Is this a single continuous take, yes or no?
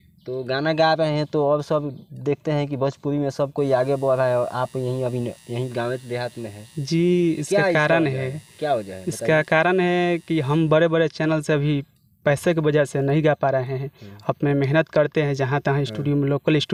yes